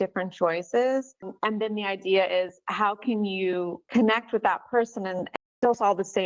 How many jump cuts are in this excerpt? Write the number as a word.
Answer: three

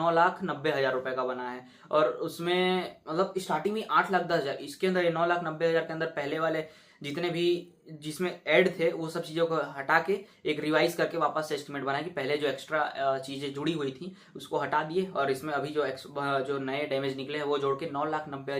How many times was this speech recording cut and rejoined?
zero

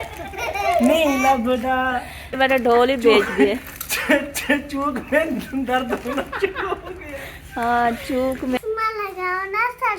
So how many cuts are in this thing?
two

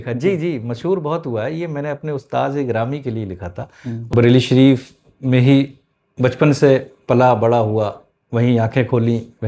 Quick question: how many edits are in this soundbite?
one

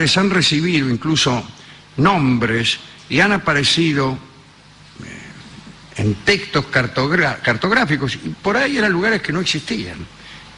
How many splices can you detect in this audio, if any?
one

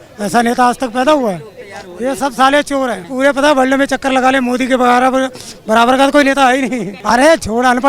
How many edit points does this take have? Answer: two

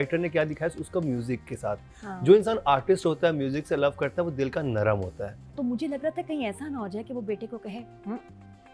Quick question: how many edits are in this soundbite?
one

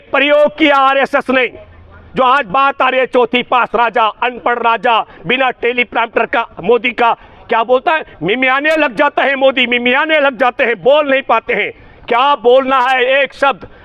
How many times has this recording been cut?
zero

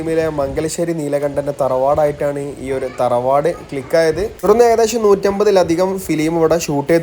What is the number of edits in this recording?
one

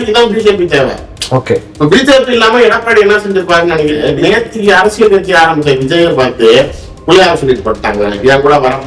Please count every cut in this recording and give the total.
one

